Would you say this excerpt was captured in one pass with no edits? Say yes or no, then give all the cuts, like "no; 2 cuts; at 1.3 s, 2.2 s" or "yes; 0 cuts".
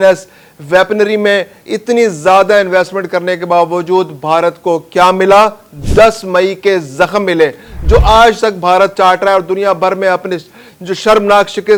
yes; 0 cuts